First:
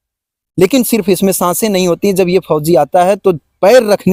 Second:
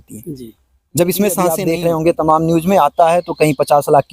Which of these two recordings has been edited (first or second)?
second